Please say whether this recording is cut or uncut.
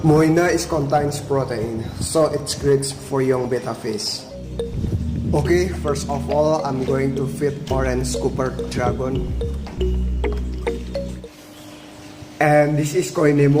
cut